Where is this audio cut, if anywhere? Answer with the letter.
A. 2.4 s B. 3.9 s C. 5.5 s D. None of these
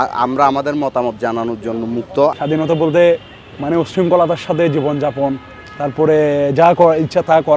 A